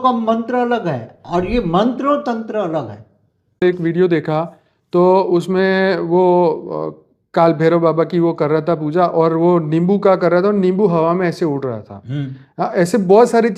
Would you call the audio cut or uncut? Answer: cut